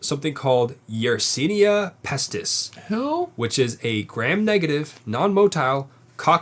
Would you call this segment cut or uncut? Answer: uncut